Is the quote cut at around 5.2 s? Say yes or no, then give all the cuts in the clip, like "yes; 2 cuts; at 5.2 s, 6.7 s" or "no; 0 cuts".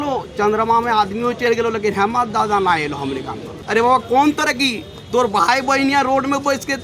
no; 1 cut; at 3.5 s